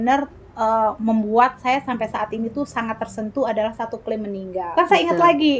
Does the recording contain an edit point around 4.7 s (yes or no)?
yes